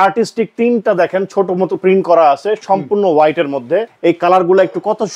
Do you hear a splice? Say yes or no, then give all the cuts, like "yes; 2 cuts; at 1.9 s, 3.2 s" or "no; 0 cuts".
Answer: yes; 1 cut; at 3.9 s